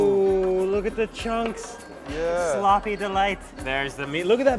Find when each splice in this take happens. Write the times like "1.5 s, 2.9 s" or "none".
3.5 s